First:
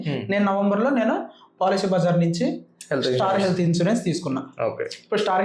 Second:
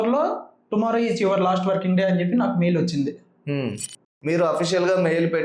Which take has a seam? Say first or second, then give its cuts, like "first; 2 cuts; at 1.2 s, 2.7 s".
second; 1 cut; at 4.1 s